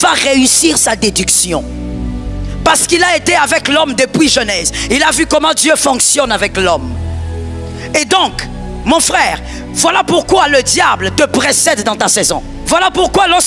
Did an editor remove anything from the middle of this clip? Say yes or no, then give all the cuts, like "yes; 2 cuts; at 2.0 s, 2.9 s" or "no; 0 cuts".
yes; 1 cut; at 12.5 s